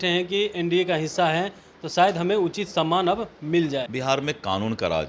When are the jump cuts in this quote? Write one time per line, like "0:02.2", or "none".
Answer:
0:03.9

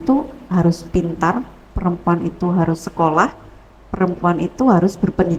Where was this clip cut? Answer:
none

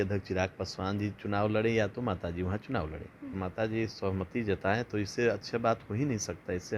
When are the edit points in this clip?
0:03.4

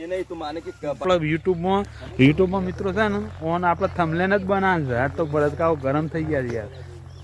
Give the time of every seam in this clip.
0:01.0

